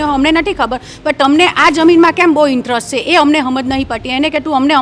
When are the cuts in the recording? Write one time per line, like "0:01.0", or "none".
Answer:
none